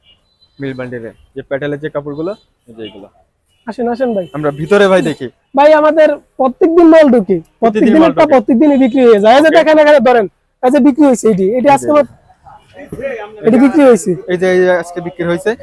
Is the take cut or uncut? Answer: uncut